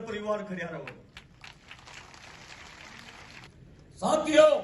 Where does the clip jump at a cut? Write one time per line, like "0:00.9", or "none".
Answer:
0:03.4